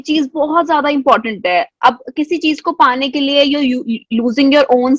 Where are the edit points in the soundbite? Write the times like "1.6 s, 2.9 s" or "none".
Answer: none